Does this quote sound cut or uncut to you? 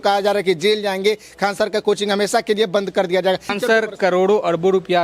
cut